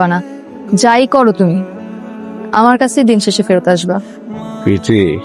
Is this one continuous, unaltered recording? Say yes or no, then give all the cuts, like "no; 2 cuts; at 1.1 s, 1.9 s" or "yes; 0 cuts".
yes; 0 cuts